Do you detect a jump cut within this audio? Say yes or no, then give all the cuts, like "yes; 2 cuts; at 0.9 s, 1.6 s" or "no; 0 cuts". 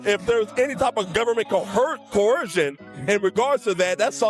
no; 0 cuts